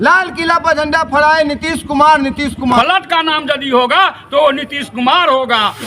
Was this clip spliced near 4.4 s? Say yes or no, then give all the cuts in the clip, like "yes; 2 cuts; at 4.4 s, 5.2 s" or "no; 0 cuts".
no; 1 cut; at 2.8 s